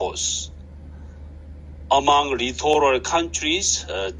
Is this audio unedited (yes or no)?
yes